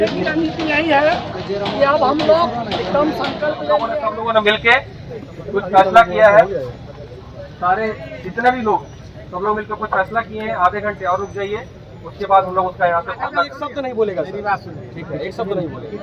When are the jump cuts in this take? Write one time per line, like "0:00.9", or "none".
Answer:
0:03.9
0:13.6